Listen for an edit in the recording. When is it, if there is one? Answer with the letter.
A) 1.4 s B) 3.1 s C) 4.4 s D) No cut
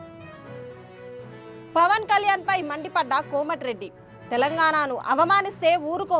A